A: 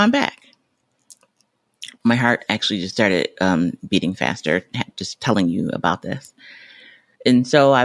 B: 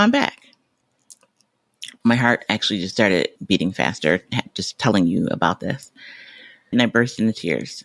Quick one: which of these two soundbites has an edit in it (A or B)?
B